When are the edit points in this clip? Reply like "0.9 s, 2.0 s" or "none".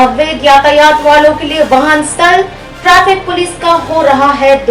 none